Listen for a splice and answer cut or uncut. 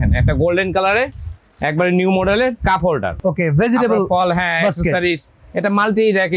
cut